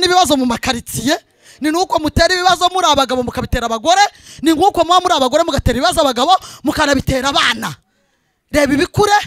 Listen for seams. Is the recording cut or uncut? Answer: uncut